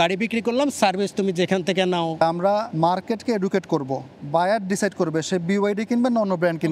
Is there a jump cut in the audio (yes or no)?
yes